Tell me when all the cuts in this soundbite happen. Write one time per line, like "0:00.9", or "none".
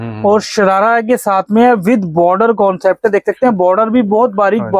none

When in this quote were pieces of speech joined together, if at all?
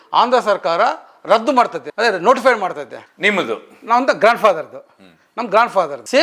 none

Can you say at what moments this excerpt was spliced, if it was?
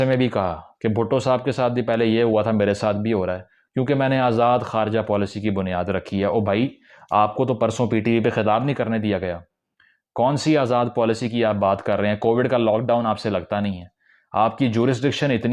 none

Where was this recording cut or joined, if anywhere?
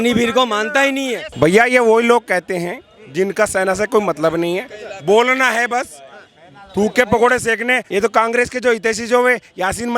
0:01.2
0:07.8

